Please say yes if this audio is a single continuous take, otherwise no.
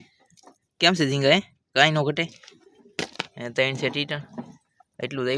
yes